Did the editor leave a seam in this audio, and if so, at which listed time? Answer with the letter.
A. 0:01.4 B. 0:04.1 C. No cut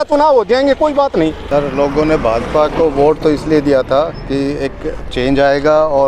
A